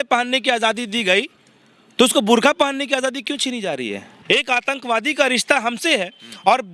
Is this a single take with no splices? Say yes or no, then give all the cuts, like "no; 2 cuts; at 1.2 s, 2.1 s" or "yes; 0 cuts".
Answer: no; 1 cut; at 4.1 s